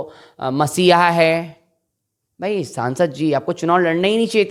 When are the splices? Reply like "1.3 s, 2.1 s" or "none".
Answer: none